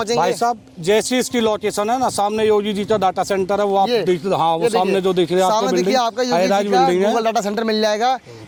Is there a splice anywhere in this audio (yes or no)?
no